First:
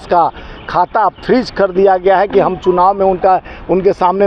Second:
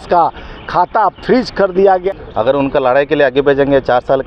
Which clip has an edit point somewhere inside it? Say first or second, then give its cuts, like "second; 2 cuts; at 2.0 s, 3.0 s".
second; 1 cut; at 2.0 s